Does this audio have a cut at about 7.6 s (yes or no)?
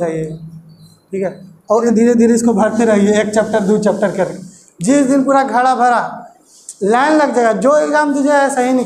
no